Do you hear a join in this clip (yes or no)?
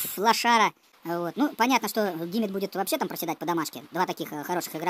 yes